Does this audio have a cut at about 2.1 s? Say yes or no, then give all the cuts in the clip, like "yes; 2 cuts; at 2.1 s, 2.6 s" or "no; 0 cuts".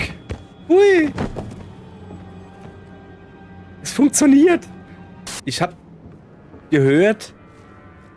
no; 1 cut; at 5.4 s